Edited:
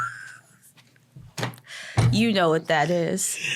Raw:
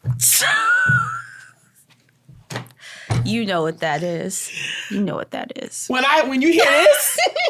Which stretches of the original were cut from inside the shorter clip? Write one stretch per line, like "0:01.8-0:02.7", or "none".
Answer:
none